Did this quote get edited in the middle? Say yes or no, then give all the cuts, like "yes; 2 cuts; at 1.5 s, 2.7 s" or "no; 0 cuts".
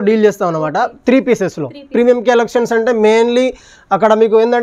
no; 0 cuts